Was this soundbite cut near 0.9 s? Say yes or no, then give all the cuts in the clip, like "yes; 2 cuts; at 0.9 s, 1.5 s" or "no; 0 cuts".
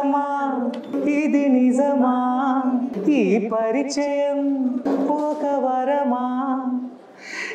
yes; 3 cuts; at 0.9 s, 2.9 s, 4.8 s